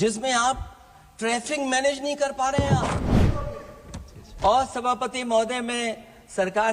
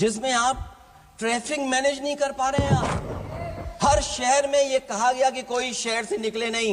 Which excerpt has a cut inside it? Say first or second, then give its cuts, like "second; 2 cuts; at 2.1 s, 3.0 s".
first; 1 cut; at 3.2 s